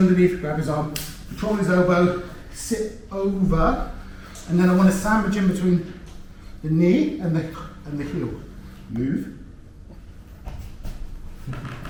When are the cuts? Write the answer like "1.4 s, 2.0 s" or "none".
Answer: none